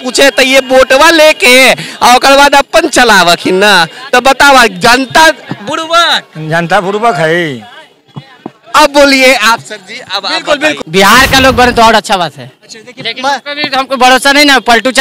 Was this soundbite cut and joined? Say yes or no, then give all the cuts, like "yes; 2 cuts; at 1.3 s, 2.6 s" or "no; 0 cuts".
yes; 1 cut; at 10.8 s